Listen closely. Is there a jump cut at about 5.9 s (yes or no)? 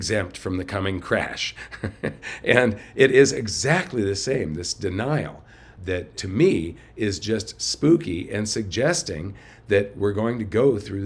yes